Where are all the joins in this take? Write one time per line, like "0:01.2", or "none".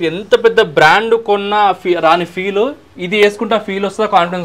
none

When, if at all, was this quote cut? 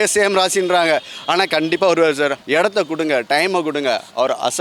0:02.4

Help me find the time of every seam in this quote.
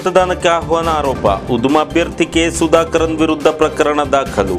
none

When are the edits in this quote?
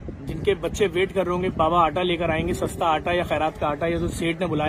none

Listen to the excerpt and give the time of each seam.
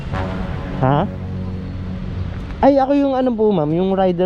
none

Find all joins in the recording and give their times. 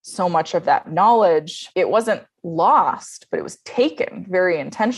0:01.6

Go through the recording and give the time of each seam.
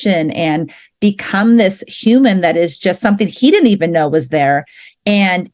none

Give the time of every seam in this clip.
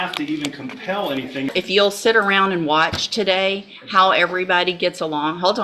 0:01.5

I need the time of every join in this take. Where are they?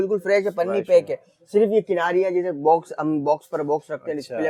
none

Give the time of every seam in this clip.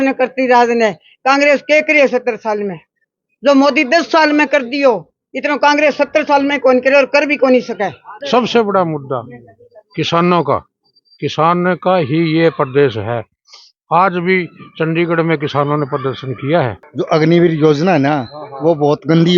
0:08.2
0:16.8

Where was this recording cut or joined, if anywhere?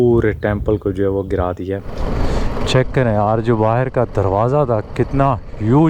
0:02.0

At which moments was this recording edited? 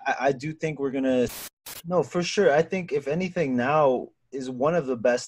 0:01.6

